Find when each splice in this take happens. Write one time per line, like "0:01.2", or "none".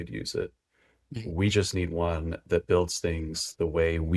none